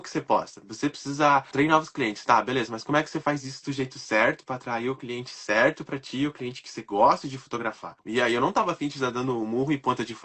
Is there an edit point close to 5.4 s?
no; 2 cuts; at 1.5 s, 8.0 s

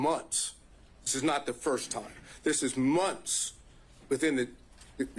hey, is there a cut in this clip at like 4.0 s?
no; 1 cut; at 2.2 s

